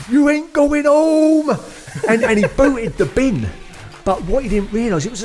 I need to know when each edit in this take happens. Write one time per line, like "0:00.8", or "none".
none

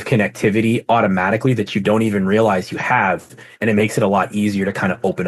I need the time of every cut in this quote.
none

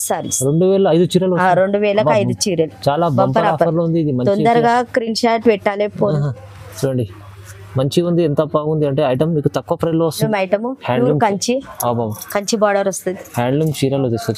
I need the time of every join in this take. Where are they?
0:10.2

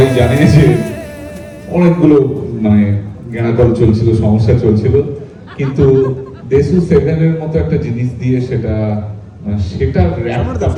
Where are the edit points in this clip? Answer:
none

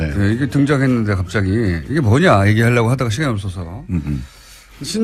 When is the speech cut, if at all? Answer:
none

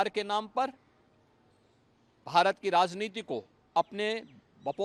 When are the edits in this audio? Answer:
none

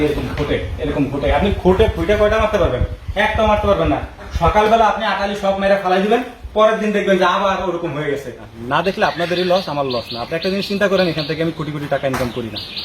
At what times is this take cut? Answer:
0:08.4

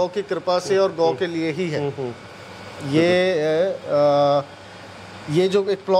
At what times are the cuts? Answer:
none

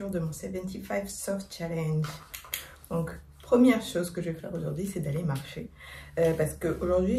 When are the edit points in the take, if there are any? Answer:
none

